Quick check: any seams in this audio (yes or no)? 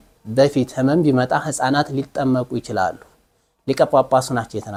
no